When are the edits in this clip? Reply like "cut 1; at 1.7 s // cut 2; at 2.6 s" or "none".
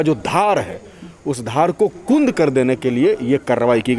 none